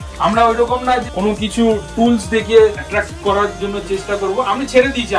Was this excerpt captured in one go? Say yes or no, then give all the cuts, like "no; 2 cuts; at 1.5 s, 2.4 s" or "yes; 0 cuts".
no; 2 cuts; at 1.0 s, 2.8 s